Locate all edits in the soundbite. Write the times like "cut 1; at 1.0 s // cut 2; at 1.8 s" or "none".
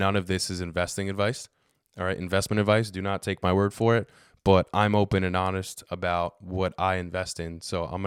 none